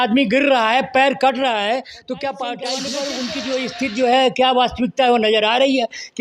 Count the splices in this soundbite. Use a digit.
1